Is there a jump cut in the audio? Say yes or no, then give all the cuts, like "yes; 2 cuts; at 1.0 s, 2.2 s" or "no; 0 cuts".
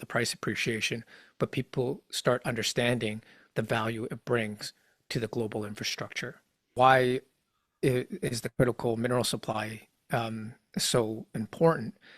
yes; 1 cut; at 6.8 s